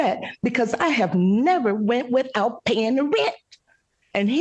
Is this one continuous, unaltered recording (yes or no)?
yes